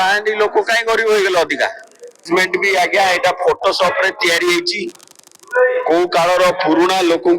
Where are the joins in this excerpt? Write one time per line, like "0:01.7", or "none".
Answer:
0:02.2